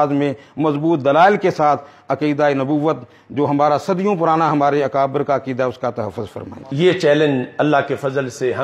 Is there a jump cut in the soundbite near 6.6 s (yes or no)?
yes